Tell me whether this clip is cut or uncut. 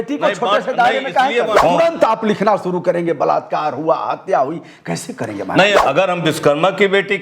cut